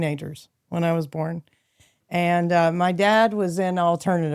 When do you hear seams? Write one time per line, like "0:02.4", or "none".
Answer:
none